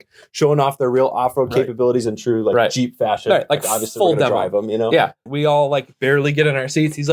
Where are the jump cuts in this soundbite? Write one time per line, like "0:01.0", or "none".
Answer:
0:05.2